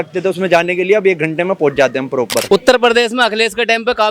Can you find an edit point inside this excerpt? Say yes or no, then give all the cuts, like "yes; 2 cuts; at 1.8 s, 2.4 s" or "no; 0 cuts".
yes; 1 cut; at 2.4 s